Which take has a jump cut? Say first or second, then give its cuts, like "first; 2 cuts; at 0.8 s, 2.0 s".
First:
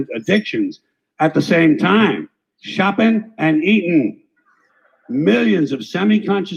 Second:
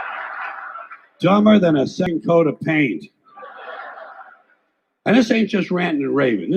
second; 1 cut; at 2.1 s